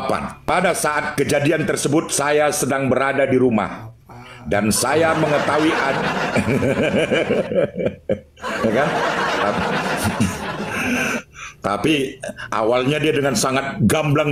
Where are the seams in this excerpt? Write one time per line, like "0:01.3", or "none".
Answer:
none